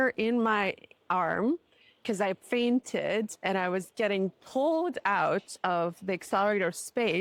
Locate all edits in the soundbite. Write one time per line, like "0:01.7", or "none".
none